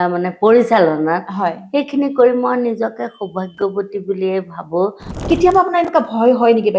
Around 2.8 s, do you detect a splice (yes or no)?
no